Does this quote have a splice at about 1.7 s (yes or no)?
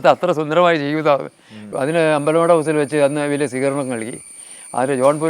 yes